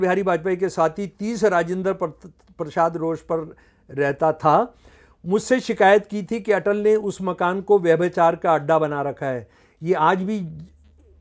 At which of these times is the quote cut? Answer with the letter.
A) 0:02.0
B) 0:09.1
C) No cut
C